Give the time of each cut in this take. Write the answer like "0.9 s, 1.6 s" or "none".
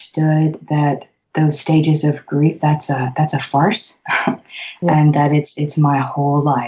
1.2 s